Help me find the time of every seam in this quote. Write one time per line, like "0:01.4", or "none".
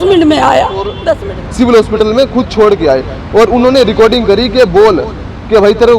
0:01.1